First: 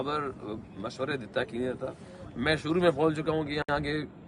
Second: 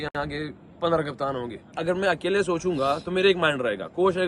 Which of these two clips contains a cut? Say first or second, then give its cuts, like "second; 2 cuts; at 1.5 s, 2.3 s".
second; 1 cut; at 1.7 s